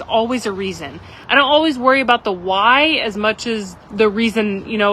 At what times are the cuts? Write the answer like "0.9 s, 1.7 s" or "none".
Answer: 1.1 s, 3.7 s